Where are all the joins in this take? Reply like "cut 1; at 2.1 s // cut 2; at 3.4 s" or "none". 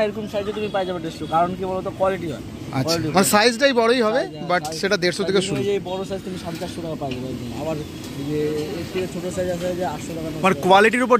none